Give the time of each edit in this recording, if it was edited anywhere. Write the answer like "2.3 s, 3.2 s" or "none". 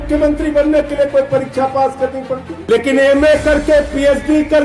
2.5 s